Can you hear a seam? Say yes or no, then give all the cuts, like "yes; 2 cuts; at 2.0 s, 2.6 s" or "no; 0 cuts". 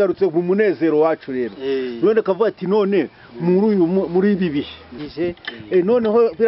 yes; 1 cut; at 5.0 s